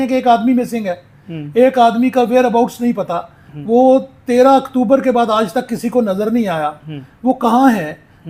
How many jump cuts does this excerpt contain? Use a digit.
0